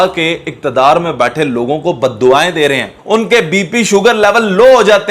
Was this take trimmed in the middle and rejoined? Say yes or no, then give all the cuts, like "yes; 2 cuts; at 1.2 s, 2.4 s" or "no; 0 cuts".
yes; 1 cut; at 3.0 s